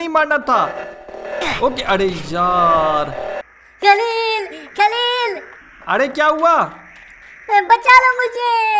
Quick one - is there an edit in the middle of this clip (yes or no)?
yes